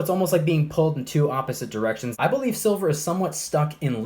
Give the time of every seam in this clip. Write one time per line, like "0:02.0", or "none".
0:02.1